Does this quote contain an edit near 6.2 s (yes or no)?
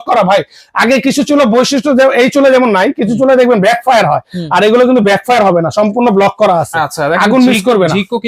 no